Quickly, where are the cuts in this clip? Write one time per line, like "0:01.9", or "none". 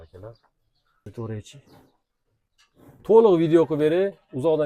0:01.1